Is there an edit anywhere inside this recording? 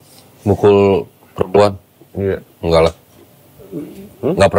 no; 0 cuts

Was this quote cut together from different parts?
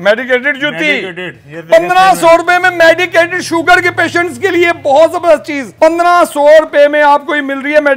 no; 0 cuts

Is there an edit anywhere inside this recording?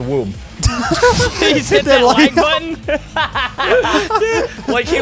no; 0 cuts

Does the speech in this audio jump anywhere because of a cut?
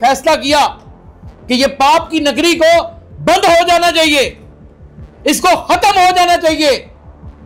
no; 0 cuts

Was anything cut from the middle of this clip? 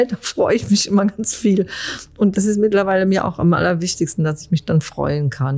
yes; 1 cut; at 2.3 s

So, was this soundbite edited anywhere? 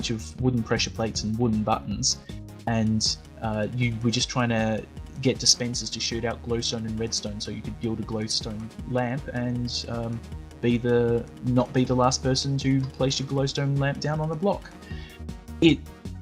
no; 0 cuts

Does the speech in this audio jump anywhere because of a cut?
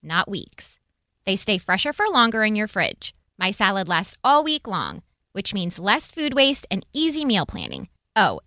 no; 0 cuts

